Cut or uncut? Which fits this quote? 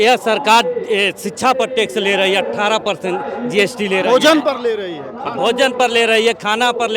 uncut